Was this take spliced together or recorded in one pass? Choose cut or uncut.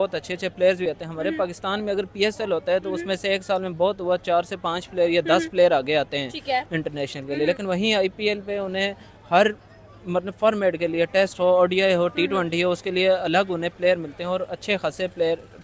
uncut